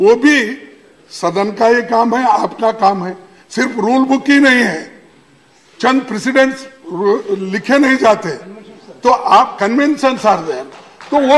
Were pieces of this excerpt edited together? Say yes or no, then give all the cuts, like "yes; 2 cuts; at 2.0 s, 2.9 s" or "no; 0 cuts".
no; 0 cuts